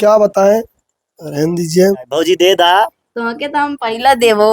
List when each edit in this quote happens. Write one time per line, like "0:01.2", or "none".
0:02.1